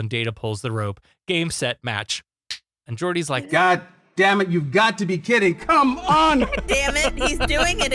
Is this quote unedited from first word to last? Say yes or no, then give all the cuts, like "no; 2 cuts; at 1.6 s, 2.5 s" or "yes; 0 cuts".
no; 2 cuts; at 3.2 s, 6.4 s